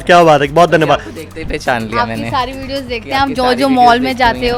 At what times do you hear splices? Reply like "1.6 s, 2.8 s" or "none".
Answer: none